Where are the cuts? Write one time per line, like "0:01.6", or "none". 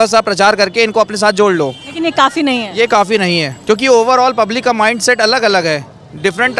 none